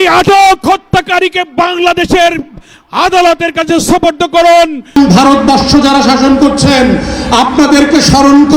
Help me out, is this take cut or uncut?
cut